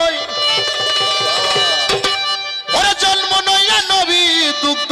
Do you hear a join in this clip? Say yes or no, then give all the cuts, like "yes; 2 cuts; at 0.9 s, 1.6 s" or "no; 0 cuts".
no; 0 cuts